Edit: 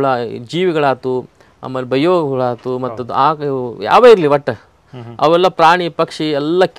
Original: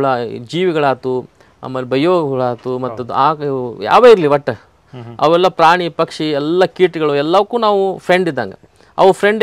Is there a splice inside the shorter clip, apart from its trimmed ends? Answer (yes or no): no